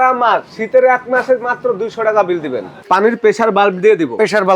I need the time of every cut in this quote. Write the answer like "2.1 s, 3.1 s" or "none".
2.7 s